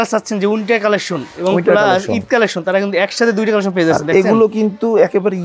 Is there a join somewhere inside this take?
no; 0 cuts

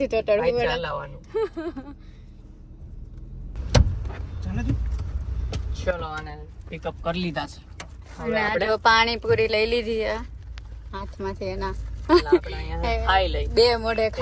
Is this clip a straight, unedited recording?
yes; 0 cuts

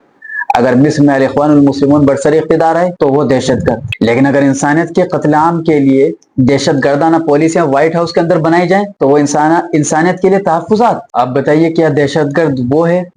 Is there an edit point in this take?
no; 0 cuts

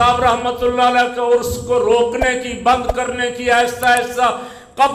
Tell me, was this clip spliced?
no; 0 cuts

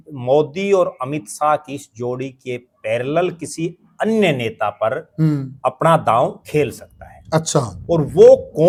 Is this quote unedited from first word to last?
yes; 0 cuts

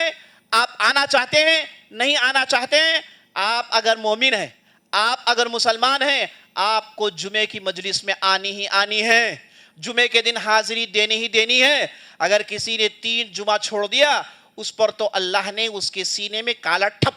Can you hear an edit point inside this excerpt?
no; 0 cuts

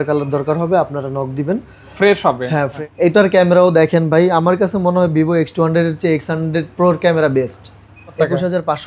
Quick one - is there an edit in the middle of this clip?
yes; 2 cuts; at 2.7 s, 8.2 s

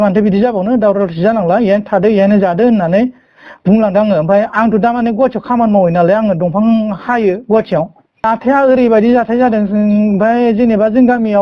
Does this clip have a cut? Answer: yes; 1 cut; at 8.2 s

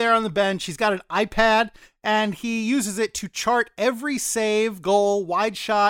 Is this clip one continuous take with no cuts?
yes; 0 cuts

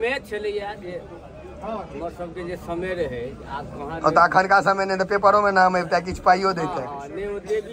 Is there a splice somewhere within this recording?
no; 0 cuts

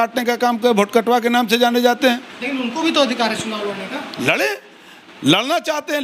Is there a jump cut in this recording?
no; 0 cuts

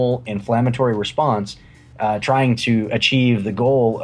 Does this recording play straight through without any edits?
yes; 0 cuts

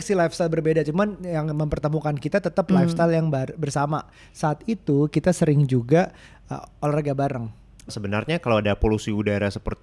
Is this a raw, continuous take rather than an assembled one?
no; 1 cut; at 7.8 s

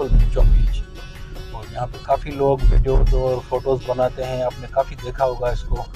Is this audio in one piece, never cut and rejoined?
yes; 0 cuts

